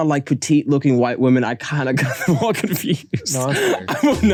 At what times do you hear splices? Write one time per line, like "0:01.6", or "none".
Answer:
none